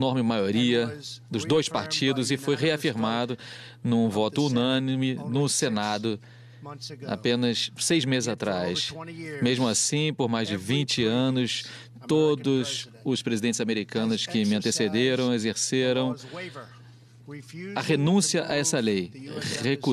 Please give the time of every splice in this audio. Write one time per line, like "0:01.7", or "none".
0:11.3